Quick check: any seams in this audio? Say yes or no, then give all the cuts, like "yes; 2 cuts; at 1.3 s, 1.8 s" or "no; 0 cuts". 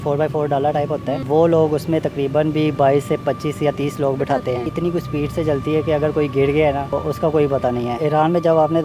yes; 4 cuts; at 1.2 s, 4.7 s, 6.9 s, 8.0 s